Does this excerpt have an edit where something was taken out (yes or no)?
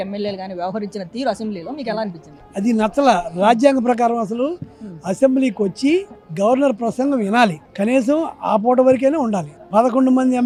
no